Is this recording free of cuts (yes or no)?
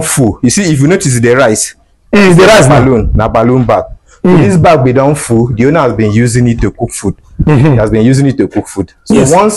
yes